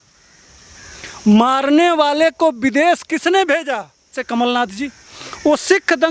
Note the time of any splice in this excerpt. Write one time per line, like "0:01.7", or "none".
0:04.1